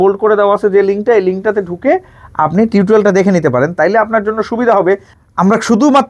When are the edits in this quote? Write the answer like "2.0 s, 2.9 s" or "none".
5.1 s